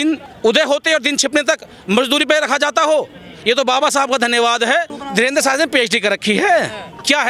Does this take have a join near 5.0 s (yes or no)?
yes